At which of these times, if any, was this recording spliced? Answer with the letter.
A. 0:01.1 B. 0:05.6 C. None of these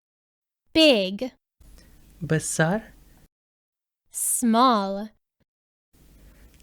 A